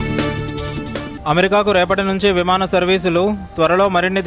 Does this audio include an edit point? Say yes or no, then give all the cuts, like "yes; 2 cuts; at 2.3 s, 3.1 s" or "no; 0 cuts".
yes; 1 cut; at 1.1 s